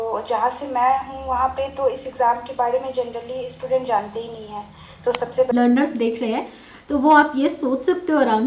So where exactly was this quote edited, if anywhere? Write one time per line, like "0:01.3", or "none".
0:05.5